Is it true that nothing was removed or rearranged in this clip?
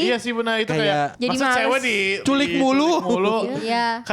no; 2 cuts; at 1.1 s, 2.2 s

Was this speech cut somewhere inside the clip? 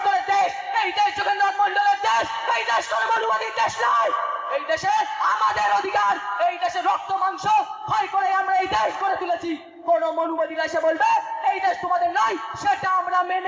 no; 0 cuts

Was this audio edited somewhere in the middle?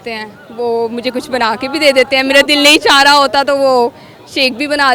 no; 0 cuts

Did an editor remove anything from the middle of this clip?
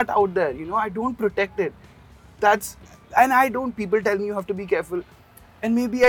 no; 0 cuts

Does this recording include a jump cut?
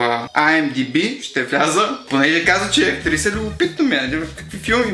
no; 0 cuts

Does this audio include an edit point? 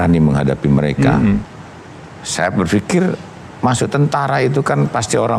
no; 0 cuts

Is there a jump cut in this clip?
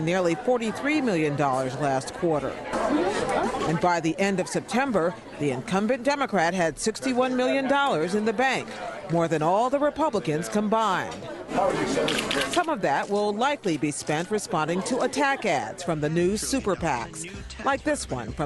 no; 0 cuts

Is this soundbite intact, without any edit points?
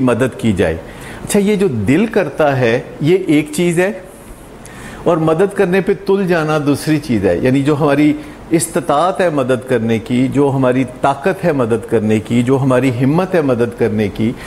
yes; 0 cuts

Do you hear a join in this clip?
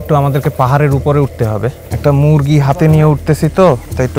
yes; 1 cut; at 1.8 s

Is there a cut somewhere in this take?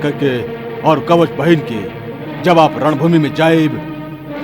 no; 0 cuts

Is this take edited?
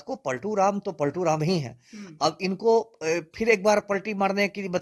no; 0 cuts

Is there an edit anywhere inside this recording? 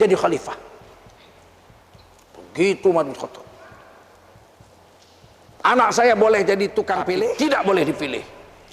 yes; 1 cut; at 7.3 s

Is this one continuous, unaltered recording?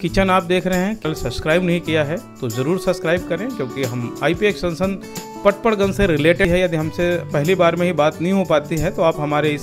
no; 2 cuts; at 1.0 s, 6.5 s

